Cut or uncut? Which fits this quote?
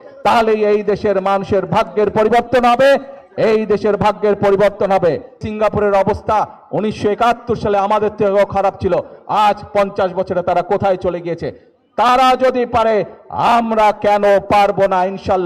cut